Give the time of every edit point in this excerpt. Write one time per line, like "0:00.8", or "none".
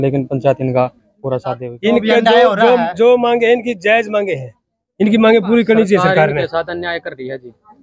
0:01.6